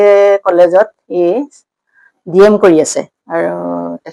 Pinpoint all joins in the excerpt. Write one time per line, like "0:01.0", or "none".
0:01.5